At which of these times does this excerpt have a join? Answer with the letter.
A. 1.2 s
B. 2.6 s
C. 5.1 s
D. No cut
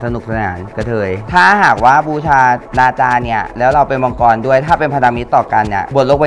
A